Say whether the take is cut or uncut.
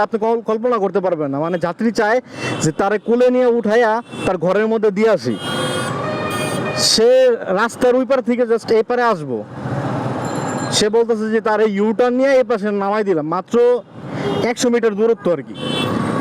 uncut